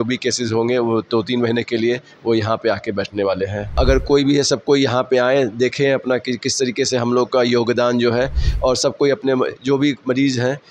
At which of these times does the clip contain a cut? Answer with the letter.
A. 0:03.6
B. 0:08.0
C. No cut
A